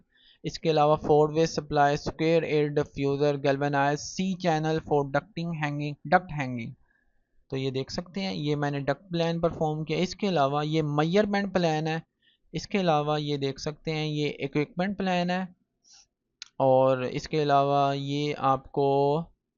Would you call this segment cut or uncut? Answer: uncut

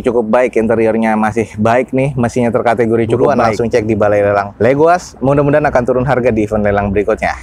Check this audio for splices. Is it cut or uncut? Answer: cut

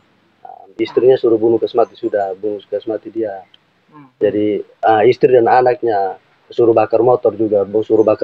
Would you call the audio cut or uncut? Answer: uncut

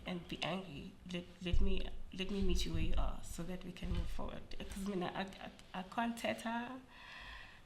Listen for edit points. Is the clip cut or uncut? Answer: uncut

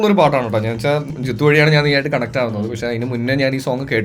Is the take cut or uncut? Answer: cut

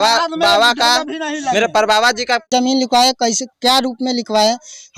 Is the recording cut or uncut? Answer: cut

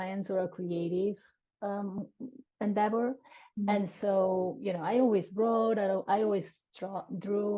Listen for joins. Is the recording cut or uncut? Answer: uncut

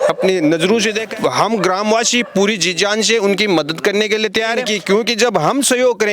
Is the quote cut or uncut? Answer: cut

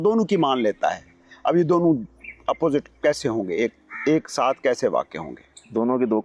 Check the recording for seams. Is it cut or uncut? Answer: uncut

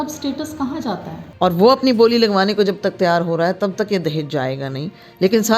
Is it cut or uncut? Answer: cut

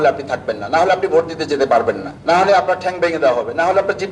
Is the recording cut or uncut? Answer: cut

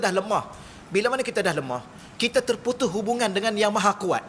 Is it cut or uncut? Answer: uncut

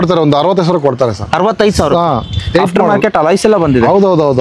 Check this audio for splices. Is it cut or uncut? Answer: uncut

